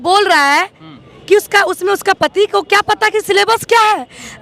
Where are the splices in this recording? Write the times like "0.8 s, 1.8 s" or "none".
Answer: none